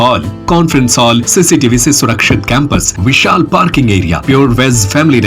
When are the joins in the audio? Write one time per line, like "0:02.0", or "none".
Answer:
0:01.3
0:02.9
0:04.2

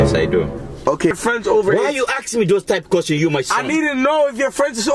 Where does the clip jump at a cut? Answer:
0:01.1

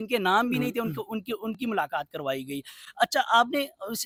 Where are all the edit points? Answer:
none

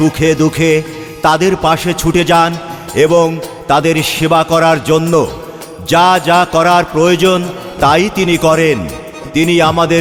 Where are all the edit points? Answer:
none

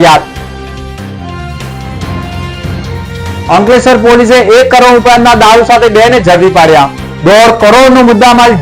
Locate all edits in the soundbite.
none

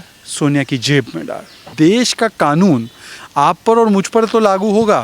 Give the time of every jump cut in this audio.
0:01.6

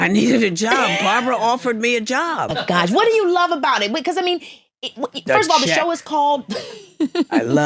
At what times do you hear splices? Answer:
0:02.6

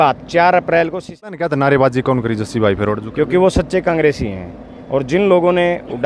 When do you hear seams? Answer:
0:01.2

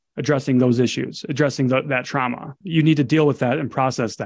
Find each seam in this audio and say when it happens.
0:02.6

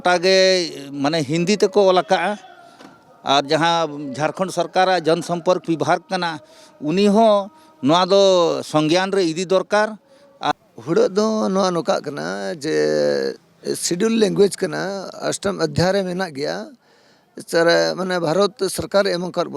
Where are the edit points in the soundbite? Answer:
0:10.5

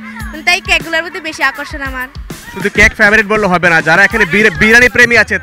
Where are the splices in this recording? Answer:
none

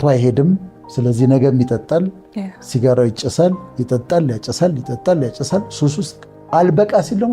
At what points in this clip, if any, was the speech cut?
none

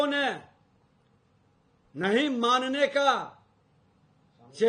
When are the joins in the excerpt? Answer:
none

